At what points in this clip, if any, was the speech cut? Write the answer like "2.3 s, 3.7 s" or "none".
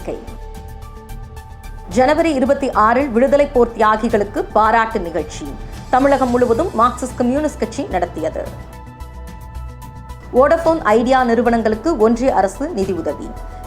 8.5 s, 10.1 s